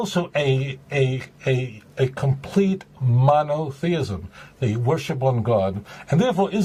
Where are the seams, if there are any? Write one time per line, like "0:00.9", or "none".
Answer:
none